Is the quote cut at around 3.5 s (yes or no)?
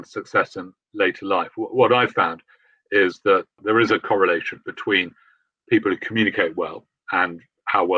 yes